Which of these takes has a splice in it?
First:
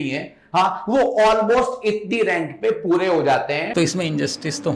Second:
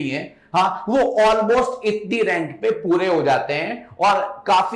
first; 1 cut; at 3.7 s

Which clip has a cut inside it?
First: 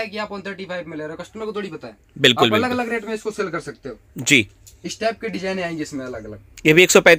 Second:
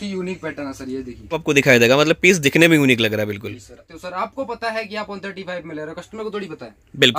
second; 2 cuts; at 1.4 s, 3.8 s

